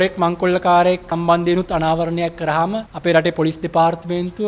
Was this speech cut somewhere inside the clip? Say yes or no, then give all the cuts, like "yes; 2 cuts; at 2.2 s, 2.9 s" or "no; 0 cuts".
yes; 2 cuts; at 1.1 s, 2.9 s